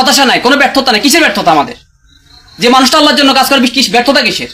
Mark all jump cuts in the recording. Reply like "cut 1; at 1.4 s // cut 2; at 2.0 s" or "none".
none